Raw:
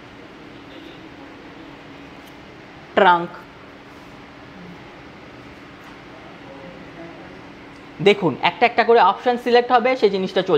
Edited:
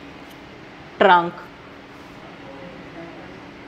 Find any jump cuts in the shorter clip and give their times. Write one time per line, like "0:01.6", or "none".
0:02.2